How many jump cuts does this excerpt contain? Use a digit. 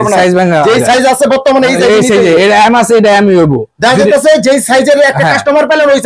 0